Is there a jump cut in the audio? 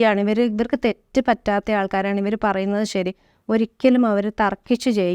no; 0 cuts

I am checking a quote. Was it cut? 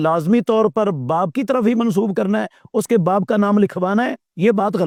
no; 0 cuts

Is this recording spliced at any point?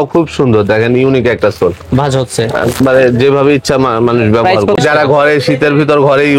yes; 1 cut; at 4.8 s

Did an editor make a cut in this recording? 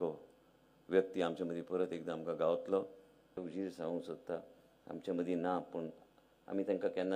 yes; 1 cut; at 3.5 s

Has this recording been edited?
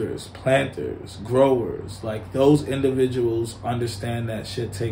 no; 0 cuts

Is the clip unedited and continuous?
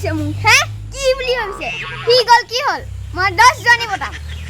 yes; 0 cuts

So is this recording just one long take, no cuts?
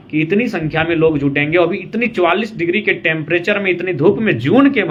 yes; 0 cuts

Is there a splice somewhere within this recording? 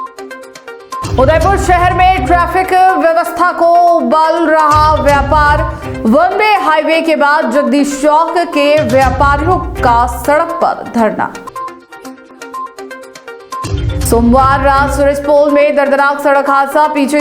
yes; 1 cut; at 1.0 s

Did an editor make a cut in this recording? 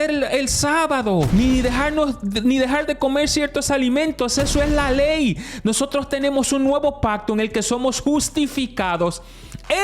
yes; 1 cut; at 1.3 s

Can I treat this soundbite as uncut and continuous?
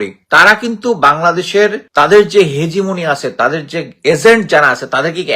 no; 1 cut; at 1.8 s

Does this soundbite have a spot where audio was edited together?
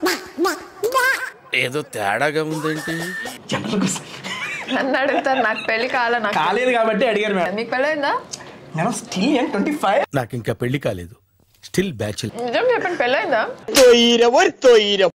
yes; 3 cuts; at 7.5 s, 10.0 s, 12.3 s

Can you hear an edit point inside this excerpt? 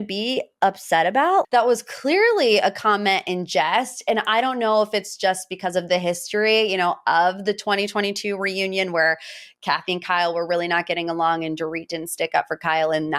yes; 1 cut; at 1.5 s

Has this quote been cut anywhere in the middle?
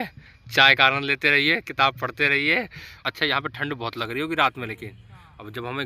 yes; 1 cut; at 3.0 s

